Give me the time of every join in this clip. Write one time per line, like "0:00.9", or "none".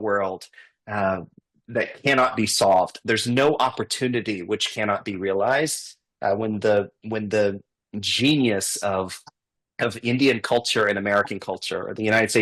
none